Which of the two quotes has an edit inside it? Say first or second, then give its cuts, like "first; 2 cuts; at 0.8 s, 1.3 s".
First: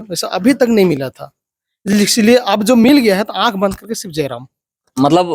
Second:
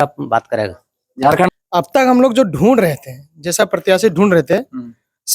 second; 1 cut; at 1.5 s